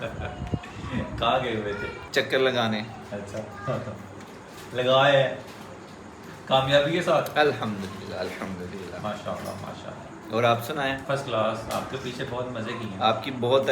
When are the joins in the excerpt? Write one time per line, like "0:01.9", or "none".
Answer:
0:01.9
0:11.0